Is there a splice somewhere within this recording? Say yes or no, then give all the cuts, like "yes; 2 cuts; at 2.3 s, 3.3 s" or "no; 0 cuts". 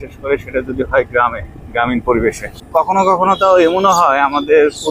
yes; 1 cut; at 2.9 s